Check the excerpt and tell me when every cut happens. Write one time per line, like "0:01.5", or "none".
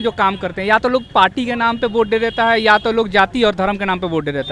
none